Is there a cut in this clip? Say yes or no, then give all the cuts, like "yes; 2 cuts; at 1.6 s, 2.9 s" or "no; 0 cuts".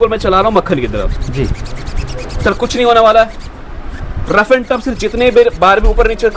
no; 0 cuts